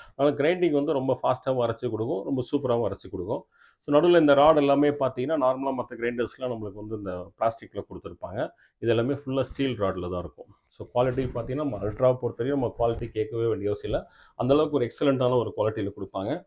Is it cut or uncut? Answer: uncut